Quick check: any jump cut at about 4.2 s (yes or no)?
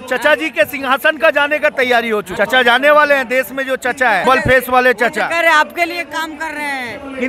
yes